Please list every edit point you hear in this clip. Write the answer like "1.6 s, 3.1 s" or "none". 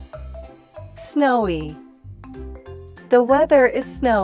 1.1 s